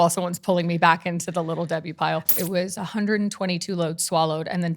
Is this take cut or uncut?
cut